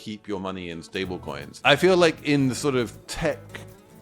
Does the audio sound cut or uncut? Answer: cut